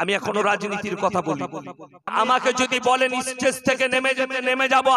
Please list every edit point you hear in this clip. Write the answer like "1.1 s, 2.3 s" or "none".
2.1 s